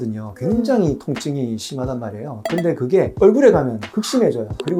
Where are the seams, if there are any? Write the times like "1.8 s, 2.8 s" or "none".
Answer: none